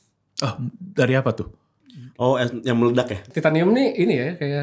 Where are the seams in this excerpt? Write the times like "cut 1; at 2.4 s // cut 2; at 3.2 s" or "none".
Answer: cut 1; at 3.3 s